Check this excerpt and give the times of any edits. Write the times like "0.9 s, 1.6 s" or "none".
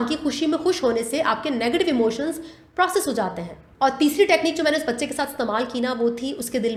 none